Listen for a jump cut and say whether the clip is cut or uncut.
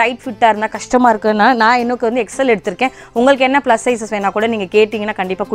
uncut